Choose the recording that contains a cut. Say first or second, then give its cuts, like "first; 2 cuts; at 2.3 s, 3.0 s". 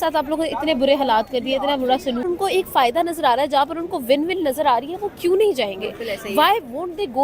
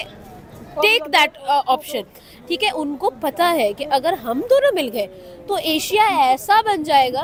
first; 1 cut; at 2.2 s